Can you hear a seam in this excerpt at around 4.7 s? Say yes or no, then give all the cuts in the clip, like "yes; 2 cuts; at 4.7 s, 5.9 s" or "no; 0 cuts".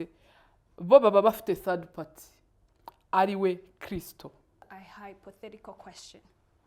yes; 1 cut; at 4.7 s